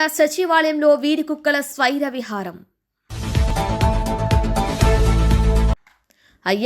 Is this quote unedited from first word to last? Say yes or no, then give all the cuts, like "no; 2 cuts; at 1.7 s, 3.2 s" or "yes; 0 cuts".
yes; 0 cuts